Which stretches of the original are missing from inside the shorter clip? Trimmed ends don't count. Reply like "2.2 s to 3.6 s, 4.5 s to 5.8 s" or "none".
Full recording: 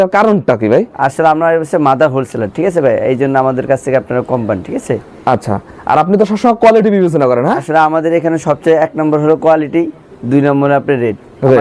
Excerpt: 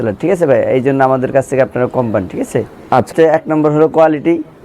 5.5 s to 8.6 s